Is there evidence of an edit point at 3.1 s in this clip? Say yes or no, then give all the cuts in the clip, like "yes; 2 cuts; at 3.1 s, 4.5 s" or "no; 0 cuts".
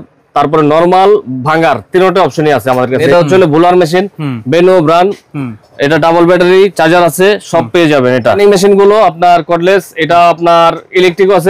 yes; 2 cuts; at 3.1 s, 8.4 s